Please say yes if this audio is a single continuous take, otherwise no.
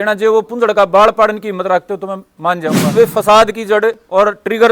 no